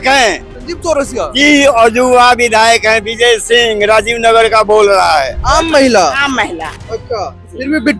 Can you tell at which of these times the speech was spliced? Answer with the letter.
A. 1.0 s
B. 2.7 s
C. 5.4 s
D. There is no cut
C